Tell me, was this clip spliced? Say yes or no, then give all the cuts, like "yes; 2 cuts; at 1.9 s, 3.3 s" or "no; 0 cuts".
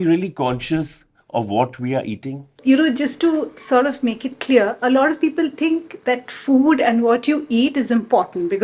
yes; 1 cut; at 2.6 s